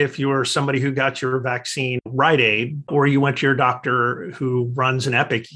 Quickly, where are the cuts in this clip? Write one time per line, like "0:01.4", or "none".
none